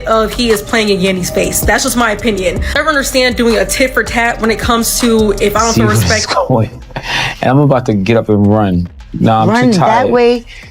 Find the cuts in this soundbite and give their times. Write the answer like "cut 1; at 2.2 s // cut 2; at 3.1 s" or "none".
cut 1; at 5.7 s